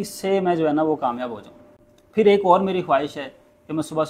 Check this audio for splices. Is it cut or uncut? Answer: uncut